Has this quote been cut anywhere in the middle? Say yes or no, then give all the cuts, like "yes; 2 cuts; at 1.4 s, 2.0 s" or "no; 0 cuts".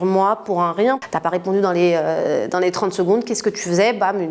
yes; 1 cut; at 1.0 s